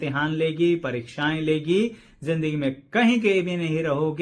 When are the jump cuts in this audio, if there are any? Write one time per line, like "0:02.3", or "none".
none